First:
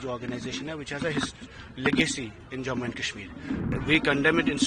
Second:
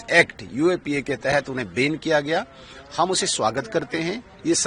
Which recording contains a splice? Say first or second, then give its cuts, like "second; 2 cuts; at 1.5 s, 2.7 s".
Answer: first; 1 cut; at 3.7 s